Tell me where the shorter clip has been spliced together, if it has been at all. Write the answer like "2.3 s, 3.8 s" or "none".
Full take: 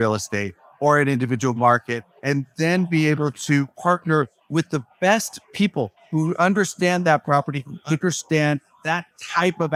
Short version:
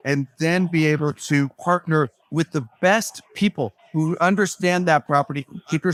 none